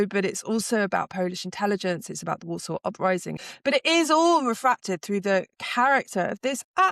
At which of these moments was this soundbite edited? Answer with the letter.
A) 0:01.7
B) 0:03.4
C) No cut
B